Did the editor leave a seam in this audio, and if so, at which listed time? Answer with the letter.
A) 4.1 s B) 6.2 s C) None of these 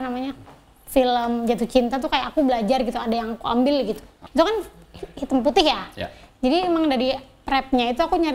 A